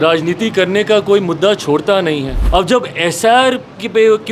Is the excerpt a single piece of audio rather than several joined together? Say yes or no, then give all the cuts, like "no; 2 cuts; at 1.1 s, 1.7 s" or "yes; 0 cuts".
no; 1 cut; at 2.3 s